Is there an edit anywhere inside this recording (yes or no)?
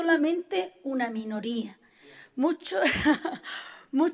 no